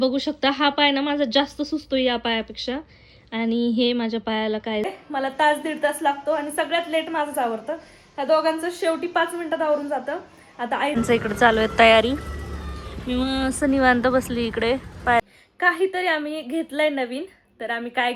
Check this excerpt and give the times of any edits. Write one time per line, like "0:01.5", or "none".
0:04.9
0:10.9
0:15.2